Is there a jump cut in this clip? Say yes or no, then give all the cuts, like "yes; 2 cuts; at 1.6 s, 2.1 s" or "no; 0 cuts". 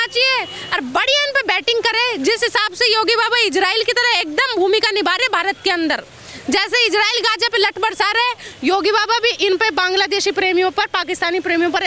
no; 0 cuts